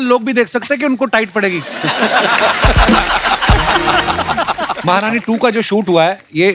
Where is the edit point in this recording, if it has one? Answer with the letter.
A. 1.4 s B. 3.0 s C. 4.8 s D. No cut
C